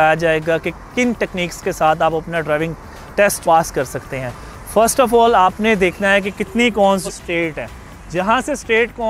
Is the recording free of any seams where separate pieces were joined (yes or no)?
yes